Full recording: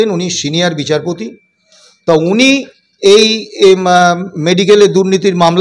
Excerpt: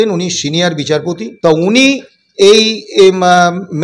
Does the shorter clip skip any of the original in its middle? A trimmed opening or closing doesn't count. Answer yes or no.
yes